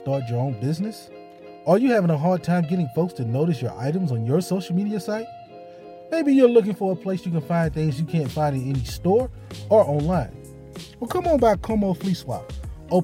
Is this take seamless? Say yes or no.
yes